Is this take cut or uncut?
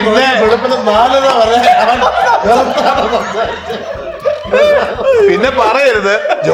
uncut